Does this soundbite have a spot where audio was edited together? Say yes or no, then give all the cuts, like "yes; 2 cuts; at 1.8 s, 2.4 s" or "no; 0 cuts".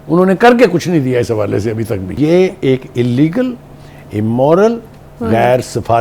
yes; 1 cut; at 2.1 s